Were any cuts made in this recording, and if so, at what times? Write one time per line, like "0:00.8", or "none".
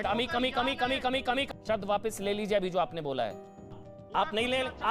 0:01.5
0:03.8